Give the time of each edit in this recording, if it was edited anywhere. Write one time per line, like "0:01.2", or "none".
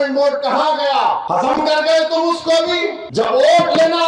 0:01.2
0:03.0